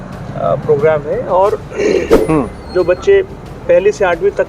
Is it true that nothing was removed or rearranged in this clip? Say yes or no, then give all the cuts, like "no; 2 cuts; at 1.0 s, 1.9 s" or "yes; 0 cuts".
no; 1 cut; at 2.2 s